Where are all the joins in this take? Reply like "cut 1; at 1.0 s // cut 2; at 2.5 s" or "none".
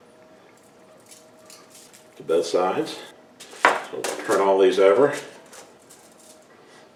none